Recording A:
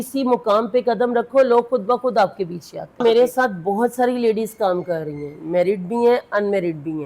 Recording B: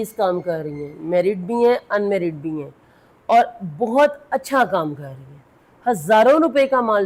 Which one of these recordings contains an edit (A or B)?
A